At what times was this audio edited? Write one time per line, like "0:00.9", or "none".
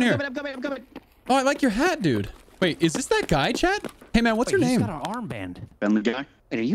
0:02.4
0:05.6